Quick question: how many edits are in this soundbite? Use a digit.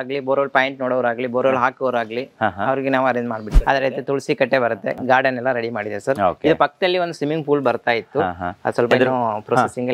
1